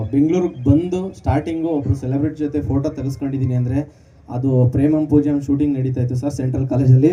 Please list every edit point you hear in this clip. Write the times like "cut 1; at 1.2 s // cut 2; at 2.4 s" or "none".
none